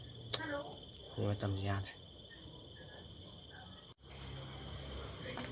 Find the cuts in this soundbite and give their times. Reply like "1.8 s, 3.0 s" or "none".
4.1 s